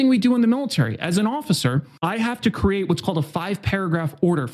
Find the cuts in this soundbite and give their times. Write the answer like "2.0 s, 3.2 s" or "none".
1.9 s